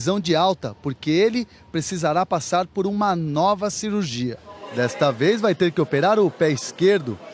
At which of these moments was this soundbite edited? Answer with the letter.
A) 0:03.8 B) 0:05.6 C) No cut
A